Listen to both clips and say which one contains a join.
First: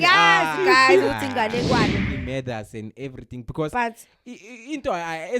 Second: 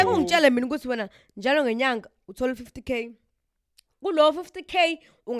first; 1 cut; at 2.0 s

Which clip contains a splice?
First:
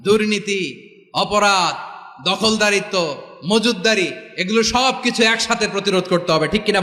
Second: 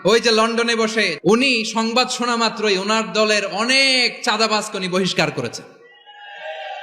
second; 1 cut; at 1.1 s

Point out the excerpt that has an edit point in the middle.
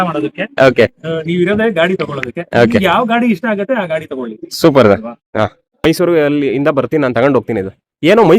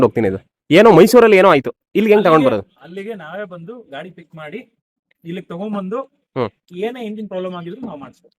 first; 1 cut; at 5.9 s

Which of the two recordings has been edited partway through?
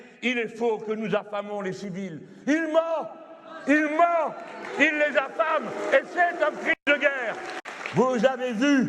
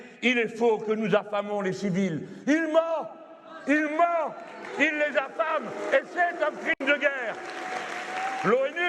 first; 1 cut; at 7.5 s

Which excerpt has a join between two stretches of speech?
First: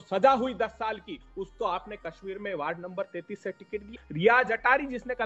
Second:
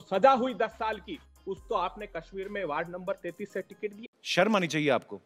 first; 2 cuts; at 1.2 s, 4.0 s

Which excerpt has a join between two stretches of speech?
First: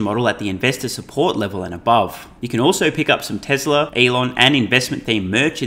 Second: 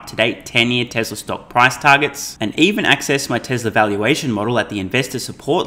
first; 2 cuts; at 2.3 s, 3.9 s

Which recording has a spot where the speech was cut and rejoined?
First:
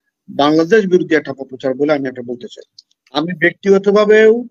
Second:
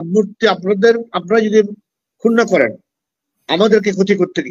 first; 1 cut; at 3.0 s

